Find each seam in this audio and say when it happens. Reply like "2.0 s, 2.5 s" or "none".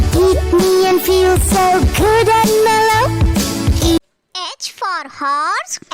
none